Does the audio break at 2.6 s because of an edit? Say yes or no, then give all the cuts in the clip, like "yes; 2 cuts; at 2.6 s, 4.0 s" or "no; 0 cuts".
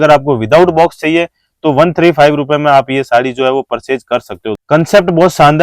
no; 1 cut; at 4.5 s